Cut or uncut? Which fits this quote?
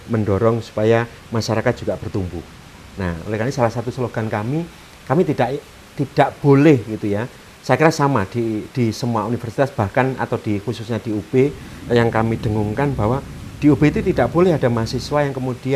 uncut